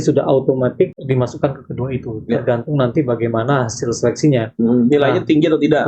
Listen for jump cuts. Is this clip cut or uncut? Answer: cut